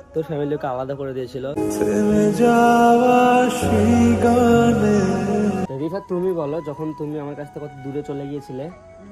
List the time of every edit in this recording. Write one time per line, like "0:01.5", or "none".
0:05.7